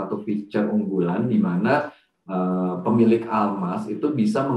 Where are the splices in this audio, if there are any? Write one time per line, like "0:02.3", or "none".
none